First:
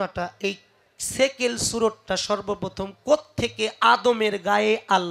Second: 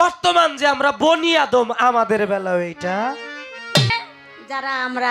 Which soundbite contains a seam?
second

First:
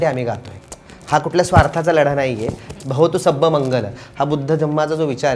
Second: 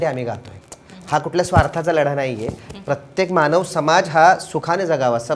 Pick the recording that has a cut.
first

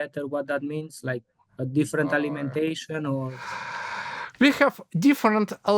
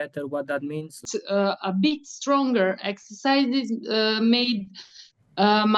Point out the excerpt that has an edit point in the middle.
second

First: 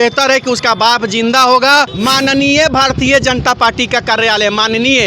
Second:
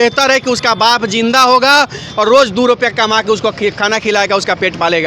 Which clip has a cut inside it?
first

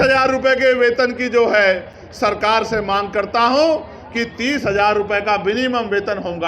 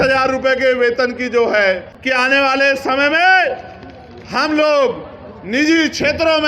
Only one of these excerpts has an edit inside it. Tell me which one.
second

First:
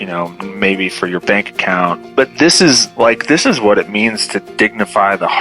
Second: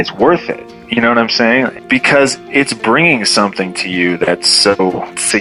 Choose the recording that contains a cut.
first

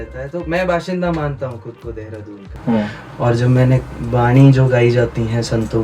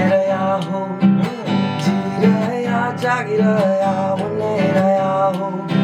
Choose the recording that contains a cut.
first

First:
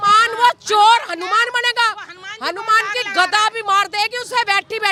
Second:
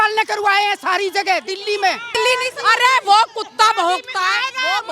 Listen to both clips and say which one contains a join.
second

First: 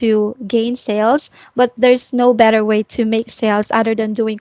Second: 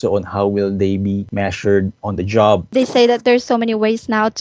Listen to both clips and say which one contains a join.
second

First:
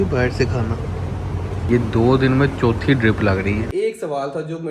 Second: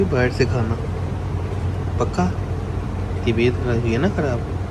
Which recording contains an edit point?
first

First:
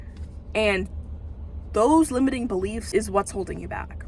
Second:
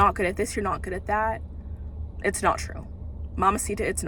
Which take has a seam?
first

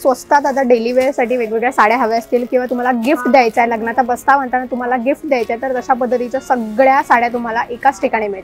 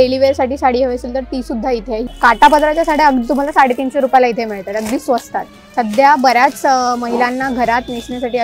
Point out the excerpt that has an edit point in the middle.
second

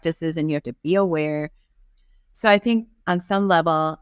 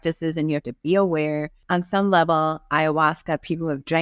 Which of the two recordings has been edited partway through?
second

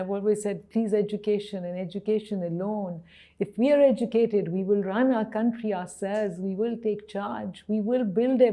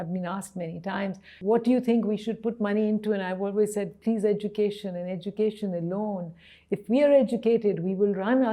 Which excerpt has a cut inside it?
second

